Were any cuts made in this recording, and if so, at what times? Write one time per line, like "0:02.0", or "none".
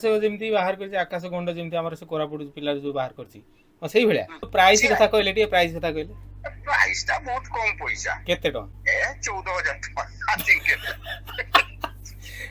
0:04.5